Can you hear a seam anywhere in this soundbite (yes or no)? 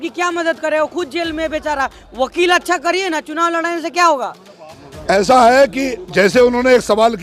no